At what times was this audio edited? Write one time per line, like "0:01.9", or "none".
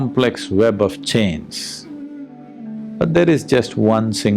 0:02.4